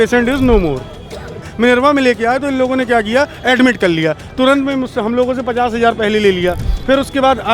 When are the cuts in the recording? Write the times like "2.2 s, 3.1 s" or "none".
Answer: 1.4 s